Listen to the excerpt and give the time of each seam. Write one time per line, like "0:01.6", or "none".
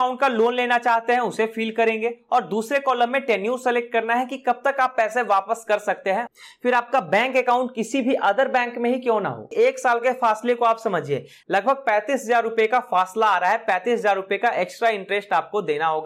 0:06.3
0:09.4